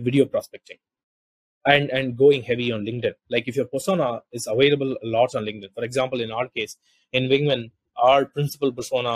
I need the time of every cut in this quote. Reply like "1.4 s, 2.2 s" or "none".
1.5 s